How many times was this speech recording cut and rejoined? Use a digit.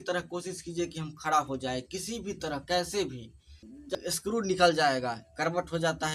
1